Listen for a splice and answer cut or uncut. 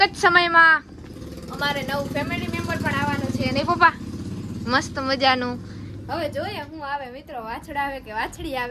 uncut